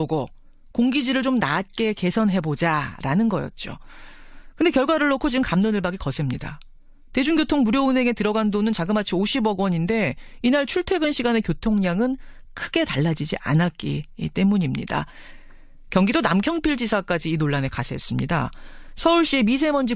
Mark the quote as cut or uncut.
cut